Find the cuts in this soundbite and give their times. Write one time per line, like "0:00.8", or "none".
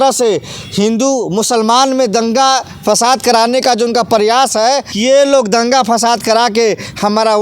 0:04.9